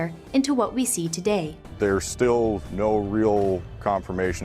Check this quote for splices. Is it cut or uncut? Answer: cut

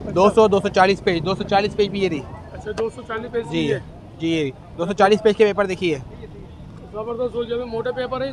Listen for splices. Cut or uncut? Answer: uncut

